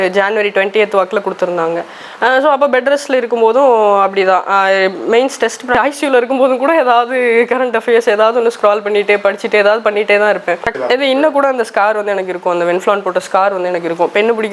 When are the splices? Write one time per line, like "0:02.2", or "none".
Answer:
0:05.8
0:10.7